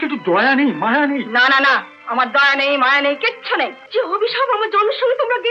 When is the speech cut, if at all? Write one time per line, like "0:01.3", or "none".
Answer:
0:03.8